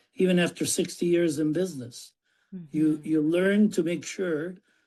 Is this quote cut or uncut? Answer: uncut